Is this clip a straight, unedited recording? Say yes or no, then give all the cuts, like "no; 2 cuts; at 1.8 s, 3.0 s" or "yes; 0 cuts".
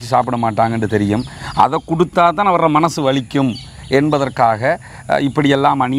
yes; 0 cuts